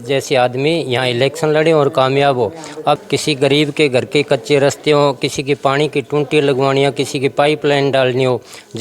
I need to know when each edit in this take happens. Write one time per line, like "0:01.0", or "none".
0:03.0